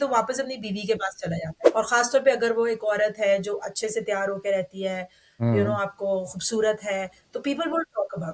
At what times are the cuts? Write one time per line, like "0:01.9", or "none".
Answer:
0:01.6